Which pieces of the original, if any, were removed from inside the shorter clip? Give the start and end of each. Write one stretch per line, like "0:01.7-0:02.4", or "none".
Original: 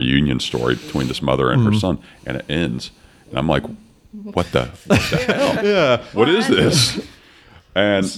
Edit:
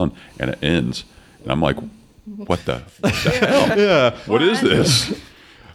none